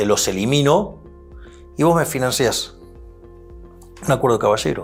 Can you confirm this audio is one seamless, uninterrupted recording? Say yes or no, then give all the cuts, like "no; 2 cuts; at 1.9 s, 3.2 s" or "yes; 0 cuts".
yes; 0 cuts